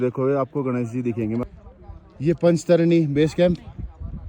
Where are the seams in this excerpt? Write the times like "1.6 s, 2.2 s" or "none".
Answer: 1.4 s